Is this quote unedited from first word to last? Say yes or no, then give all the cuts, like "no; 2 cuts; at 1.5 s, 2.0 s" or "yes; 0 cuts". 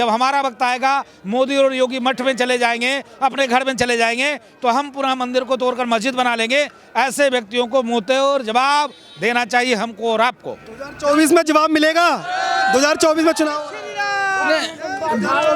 yes; 0 cuts